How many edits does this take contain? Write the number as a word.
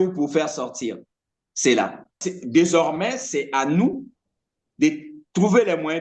one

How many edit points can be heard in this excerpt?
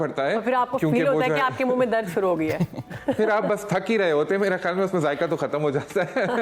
zero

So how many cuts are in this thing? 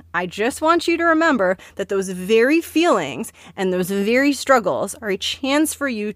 zero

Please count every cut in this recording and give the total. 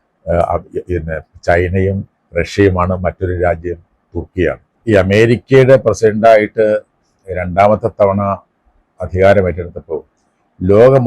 one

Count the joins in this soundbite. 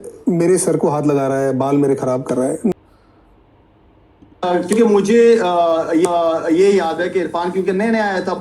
one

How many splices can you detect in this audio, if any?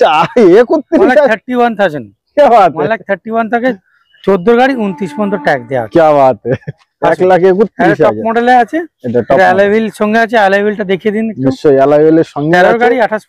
zero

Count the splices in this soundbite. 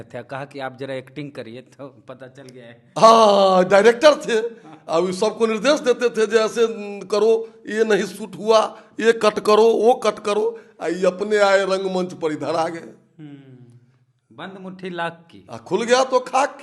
zero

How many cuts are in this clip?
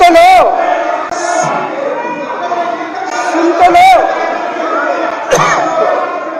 zero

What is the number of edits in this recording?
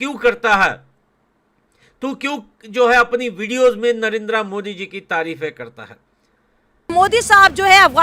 one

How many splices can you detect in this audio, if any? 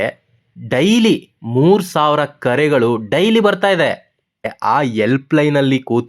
one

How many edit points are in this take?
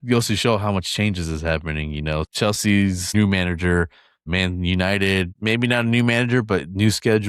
four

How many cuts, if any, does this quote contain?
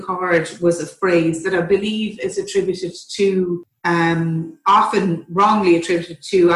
one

